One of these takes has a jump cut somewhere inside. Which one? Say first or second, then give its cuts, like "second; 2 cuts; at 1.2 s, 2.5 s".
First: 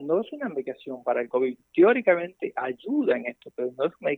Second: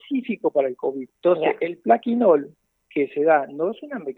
second; 1 cut; at 1.1 s